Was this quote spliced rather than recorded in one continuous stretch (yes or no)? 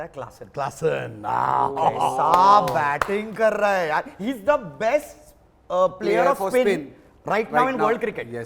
no